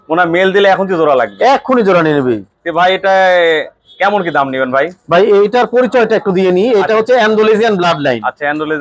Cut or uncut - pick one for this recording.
uncut